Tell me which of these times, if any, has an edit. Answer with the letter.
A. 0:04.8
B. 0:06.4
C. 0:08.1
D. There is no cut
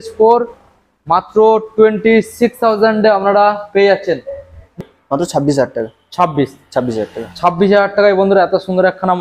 A